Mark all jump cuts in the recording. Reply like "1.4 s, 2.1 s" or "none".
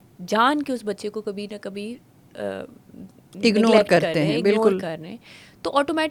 none